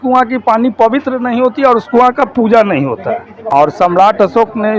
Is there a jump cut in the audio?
yes; 1 cut; at 3.3 s

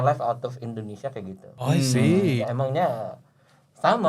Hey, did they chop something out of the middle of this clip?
yes; 2 cuts; at 1.4 s, 2.4 s

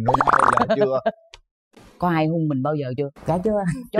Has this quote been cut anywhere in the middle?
no; 0 cuts

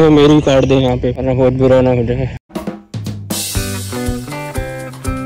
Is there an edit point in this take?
no; 0 cuts

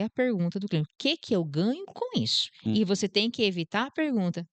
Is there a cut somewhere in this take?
no; 0 cuts

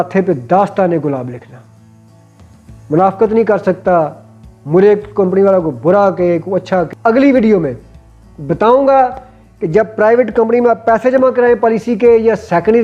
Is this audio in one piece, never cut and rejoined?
no; 1 cut; at 6.9 s

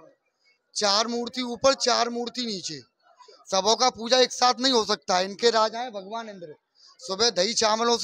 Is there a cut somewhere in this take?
no; 0 cuts

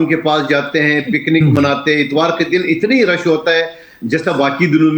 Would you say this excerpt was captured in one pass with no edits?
yes; 0 cuts

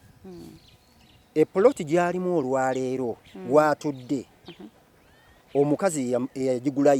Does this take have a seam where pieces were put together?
no; 0 cuts

